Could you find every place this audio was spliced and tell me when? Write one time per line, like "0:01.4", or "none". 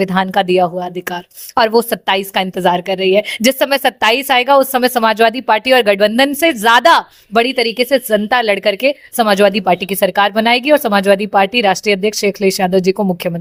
none